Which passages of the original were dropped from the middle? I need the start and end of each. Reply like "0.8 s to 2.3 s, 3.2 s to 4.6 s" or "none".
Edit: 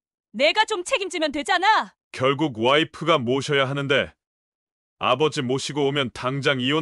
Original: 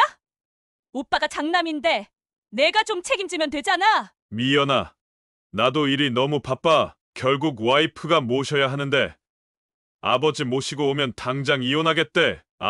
4.2 s to 7.0 s